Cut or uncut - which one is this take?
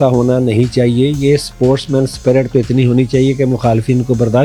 uncut